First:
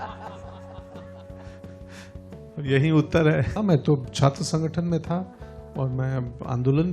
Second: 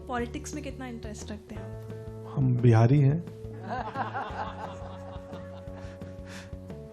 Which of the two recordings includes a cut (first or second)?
first